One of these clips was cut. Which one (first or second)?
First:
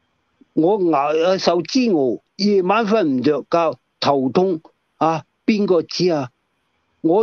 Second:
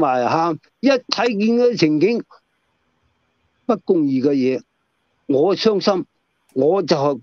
first